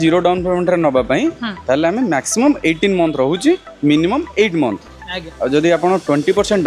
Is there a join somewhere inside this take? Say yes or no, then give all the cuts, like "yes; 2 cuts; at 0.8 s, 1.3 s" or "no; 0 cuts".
no; 0 cuts